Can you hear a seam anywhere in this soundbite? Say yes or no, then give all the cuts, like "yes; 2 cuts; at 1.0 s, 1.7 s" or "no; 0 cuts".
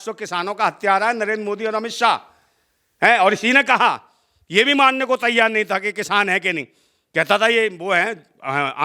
no; 0 cuts